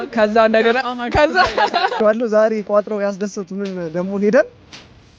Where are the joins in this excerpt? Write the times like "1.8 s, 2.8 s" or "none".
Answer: 1.9 s

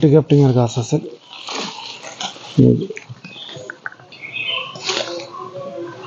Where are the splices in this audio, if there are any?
4.0 s

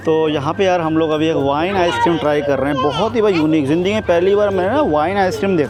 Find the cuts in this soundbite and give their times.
none

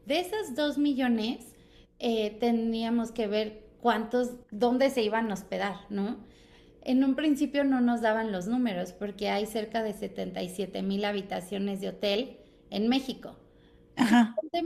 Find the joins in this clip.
none

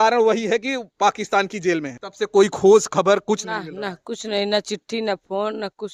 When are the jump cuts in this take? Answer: 1.9 s

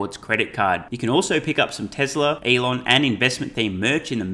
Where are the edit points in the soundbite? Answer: 2.4 s

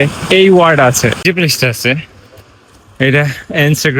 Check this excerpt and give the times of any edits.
1.2 s

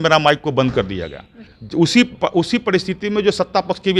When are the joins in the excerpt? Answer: 1.5 s

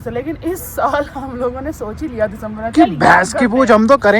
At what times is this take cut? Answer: none

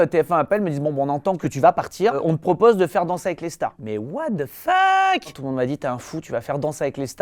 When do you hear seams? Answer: 1.4 s, 3.8 s

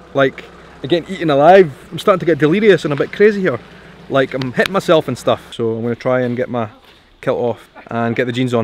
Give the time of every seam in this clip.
1.8 s

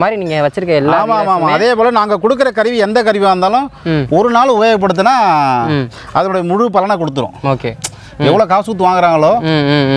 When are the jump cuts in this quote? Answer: none

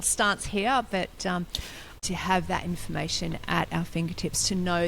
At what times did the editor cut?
2.0 s

